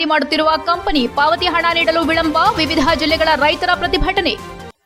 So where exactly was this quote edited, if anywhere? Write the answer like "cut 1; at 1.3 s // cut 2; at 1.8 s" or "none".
none